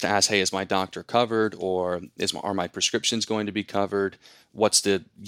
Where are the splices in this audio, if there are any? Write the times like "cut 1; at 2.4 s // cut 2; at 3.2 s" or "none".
none